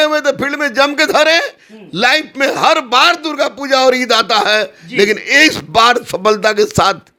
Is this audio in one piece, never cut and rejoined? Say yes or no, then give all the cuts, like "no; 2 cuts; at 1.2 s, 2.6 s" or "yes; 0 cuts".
yes; 0 cuts